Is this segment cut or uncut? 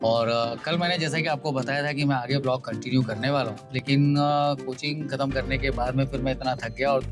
uncut